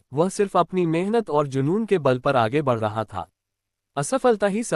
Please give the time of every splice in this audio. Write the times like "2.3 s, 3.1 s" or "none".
3.8 s